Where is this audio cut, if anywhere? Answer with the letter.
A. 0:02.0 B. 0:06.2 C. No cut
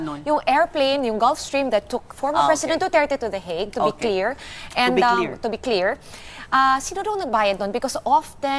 A